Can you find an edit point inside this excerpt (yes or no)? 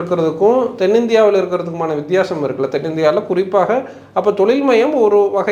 no